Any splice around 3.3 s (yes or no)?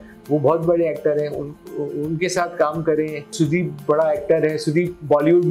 yes